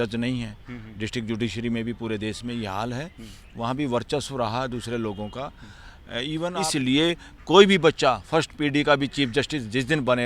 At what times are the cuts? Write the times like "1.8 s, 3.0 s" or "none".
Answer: 6.5 s